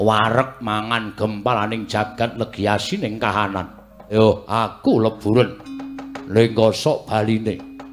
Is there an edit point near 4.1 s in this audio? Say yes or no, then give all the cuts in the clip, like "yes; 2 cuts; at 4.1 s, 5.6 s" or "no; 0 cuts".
yes; 1 cut; at 4.1 s